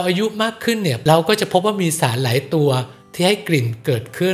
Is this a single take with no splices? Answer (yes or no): no